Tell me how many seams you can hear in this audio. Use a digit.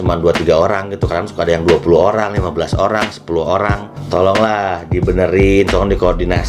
1